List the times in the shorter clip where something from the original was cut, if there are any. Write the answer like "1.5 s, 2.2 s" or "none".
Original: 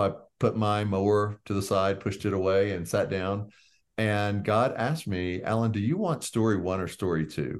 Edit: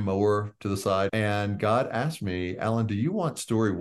1.1 s